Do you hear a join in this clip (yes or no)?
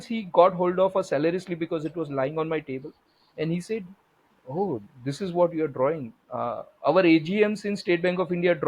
no